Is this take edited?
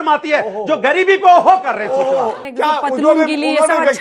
yes; 1 cut; at 2.4 s

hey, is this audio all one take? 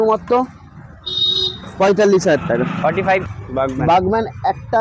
no; 1 cut; at 3.2 s

